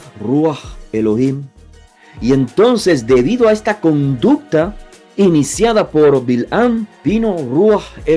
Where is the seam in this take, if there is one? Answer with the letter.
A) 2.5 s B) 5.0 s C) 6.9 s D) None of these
C